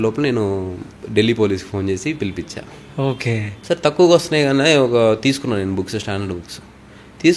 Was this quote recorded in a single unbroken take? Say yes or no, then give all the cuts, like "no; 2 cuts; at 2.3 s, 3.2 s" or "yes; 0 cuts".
no; 1 cut; at 3.5 s